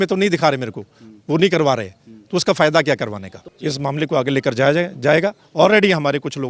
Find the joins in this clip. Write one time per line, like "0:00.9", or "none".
0:03.5